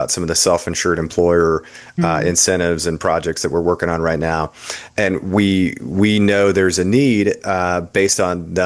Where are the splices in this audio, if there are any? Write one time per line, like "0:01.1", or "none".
none